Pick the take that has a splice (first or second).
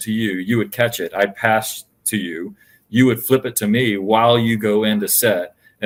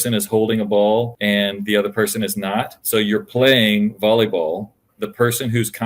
second